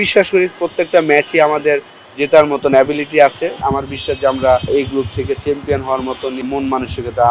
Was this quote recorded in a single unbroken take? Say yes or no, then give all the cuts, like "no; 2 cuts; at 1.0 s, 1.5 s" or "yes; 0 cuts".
no; 3 cuts; at 3.6 s, 4.7 s, 6.5 s